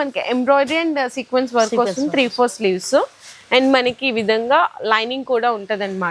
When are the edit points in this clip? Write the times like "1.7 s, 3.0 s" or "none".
none